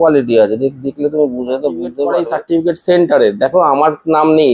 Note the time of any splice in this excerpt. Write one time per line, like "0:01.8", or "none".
0:02.2